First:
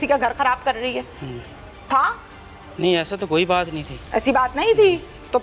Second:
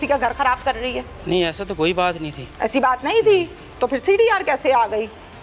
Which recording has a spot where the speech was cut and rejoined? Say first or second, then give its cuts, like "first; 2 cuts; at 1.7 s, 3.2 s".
second; 1 cut; at 1.1 s